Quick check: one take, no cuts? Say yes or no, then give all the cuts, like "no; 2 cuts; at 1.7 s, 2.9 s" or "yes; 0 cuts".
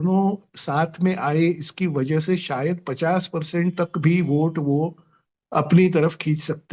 yes; 0 cuts